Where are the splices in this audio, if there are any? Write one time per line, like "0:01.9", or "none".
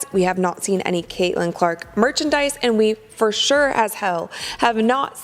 none